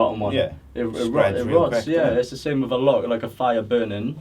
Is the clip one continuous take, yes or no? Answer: yes